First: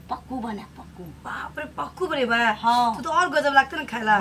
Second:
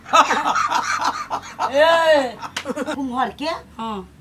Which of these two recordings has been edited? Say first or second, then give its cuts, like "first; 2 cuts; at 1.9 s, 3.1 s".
second; 1 cut; at 3.0 s